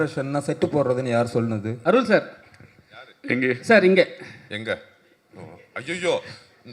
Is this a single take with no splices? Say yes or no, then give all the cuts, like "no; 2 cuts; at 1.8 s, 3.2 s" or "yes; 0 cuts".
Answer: no; 1 cut; at 1.7 s